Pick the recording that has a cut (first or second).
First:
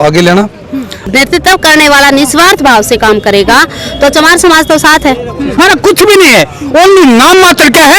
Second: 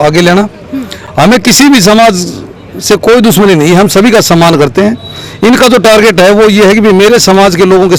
first